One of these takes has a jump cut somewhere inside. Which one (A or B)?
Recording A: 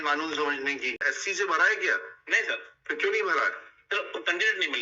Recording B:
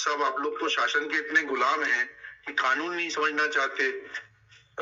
A